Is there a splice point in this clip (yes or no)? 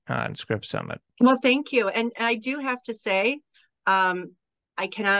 yes